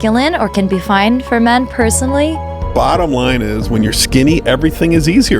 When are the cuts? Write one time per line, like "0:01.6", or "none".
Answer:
0:02.5